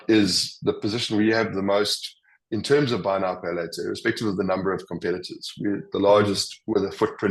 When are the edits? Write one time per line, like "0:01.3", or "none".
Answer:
none